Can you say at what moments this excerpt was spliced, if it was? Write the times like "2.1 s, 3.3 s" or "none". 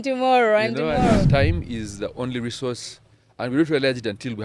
1.3 s